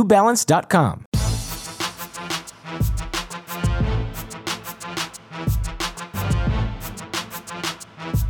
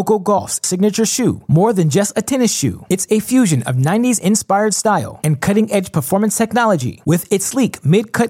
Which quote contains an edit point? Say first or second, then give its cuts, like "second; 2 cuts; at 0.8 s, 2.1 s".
first; 2 cuts; at 1.1 s, 5.7 s